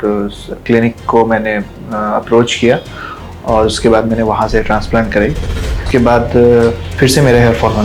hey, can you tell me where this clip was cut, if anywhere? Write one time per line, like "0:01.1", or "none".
0:05.8
0:06.8